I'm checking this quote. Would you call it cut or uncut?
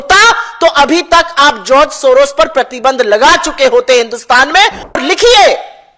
cut